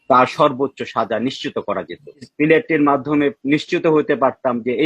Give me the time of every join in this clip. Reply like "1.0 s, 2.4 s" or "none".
2.3 s